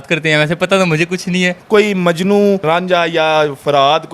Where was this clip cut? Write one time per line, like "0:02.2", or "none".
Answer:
0:01.6